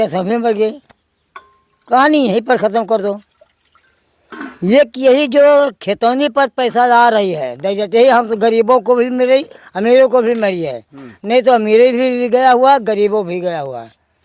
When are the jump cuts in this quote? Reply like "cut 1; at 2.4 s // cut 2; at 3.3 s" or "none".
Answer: none